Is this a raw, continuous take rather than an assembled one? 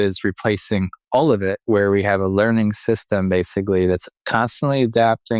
yes; 0 cuts

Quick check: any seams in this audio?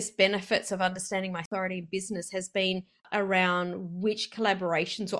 yes; 2 cuts; at 1.5 s, 3.0 s

